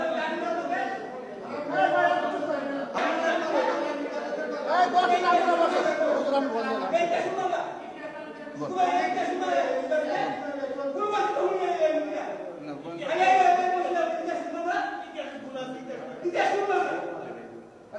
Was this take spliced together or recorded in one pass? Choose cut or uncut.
cut